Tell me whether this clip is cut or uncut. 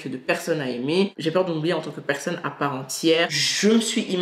cut